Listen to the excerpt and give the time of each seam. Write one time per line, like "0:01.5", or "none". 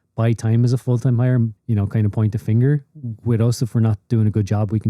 0:01.6